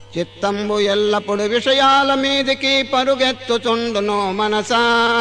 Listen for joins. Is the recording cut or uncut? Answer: cut